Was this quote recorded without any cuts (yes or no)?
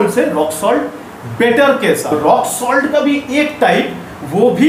no